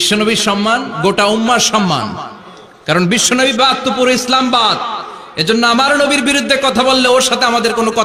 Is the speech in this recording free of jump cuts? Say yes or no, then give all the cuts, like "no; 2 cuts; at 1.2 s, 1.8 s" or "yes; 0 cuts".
yes; 0 cuts